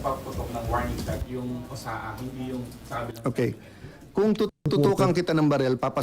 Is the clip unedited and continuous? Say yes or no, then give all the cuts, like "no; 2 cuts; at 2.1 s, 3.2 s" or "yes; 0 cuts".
no; 1 cut; at 4.9 s